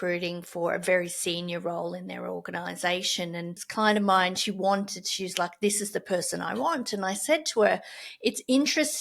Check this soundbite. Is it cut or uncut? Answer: cut